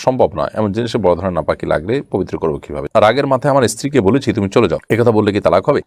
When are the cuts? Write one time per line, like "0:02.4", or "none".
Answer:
0:02.8